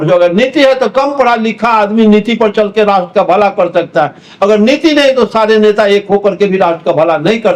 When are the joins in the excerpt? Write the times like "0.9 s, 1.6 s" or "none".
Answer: none